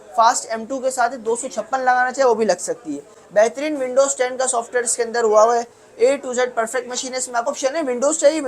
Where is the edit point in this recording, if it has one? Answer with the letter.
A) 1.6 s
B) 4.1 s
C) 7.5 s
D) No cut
C